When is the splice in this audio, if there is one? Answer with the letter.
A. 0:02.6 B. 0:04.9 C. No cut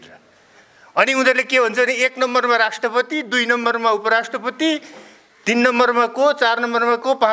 C